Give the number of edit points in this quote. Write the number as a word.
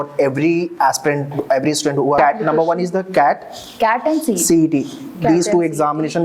one